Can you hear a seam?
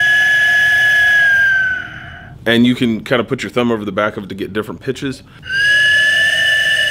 no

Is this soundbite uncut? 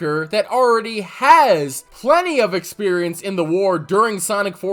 yes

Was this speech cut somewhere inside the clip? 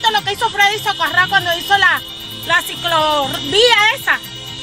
no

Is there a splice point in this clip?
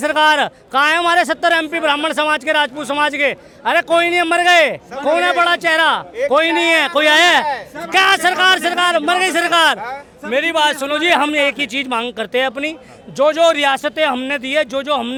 no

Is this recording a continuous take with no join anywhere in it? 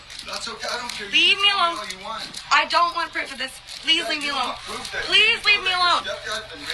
no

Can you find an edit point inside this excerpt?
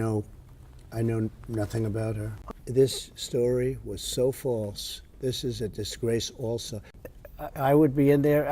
yes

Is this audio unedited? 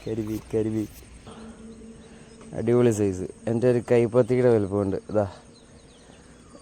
no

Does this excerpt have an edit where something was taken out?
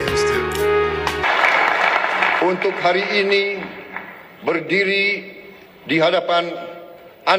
yes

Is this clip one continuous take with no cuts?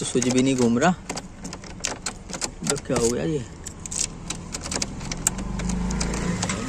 yes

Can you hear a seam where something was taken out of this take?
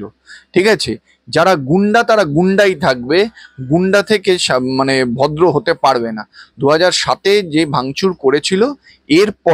no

